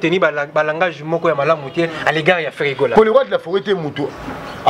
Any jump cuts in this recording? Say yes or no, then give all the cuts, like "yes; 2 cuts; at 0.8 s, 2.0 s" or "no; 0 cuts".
yes; 1 cut; at 2.9 s